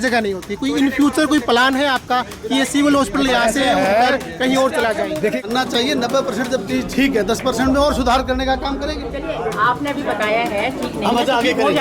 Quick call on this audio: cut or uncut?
cut